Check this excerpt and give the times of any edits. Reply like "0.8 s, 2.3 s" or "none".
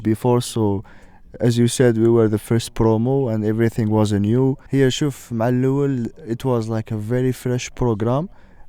none

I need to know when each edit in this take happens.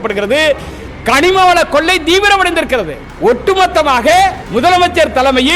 3.0 s, 4.4 s

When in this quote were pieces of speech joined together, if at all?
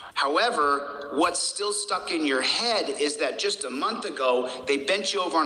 2.7 s

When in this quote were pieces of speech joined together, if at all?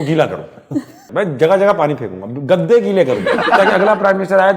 1.0 s, 3.5 s

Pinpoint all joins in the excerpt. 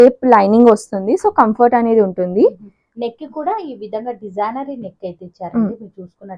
none

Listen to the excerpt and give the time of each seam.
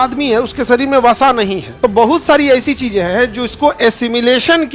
1.6 s

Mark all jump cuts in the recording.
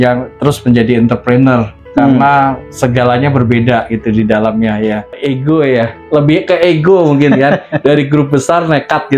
5.1 s

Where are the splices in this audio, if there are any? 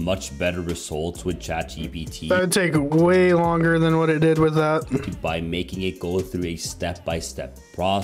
none

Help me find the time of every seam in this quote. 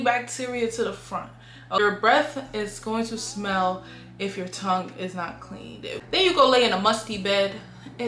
1.8 s, 6.0 s

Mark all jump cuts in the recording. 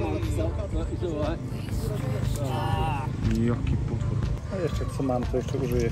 4.4 s

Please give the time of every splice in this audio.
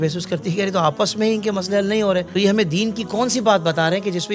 2.3 s

